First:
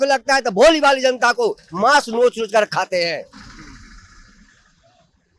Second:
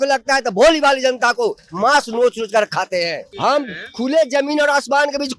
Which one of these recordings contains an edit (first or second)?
second